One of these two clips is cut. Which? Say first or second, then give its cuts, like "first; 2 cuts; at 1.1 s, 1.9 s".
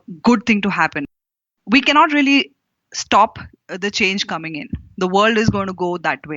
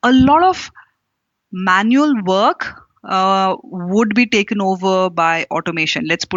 first; 1 cut; at 1.2 s